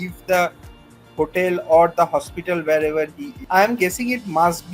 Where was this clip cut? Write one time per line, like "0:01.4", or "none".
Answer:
0:03.4